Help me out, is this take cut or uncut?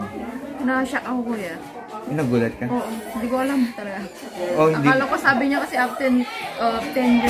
uncut